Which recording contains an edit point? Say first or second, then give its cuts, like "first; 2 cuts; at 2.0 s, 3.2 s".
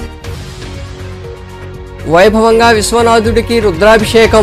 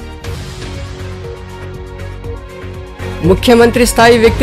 second; 1 cut; at 2.0 s